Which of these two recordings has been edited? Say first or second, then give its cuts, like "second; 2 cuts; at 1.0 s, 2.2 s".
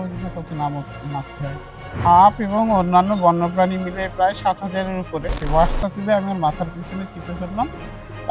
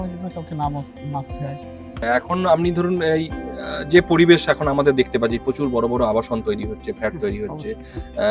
first; 2 cuts; at 1.9 s, 5.4 s